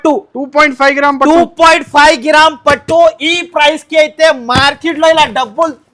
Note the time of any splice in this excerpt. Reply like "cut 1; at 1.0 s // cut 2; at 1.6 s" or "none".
none